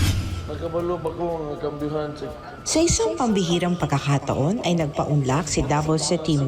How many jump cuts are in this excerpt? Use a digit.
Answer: 1